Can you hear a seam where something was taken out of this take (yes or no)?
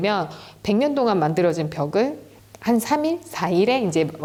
no